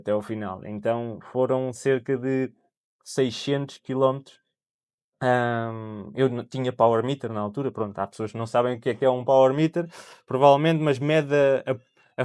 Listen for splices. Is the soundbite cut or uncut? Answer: uncut